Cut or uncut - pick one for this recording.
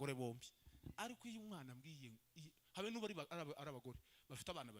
uncut